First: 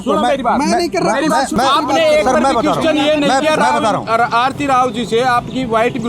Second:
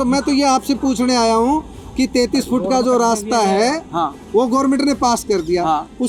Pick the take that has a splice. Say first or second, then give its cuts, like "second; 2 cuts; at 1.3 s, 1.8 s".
first; 1 cut; at 1.5 s